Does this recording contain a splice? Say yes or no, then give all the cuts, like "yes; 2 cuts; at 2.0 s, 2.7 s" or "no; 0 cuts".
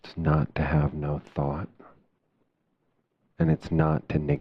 yes; 1 cut; at 3.3 s